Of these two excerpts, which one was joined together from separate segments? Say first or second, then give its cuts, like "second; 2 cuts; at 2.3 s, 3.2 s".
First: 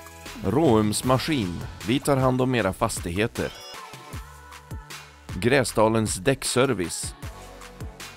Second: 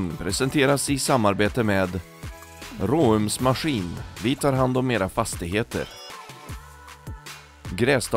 first; 1 cut; at 7.0 s